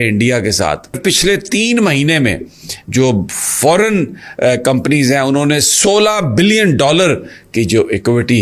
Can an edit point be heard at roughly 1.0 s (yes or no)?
yes